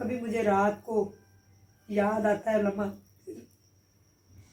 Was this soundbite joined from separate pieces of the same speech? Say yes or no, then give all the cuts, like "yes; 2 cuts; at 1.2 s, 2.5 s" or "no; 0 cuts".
no; 0 cuts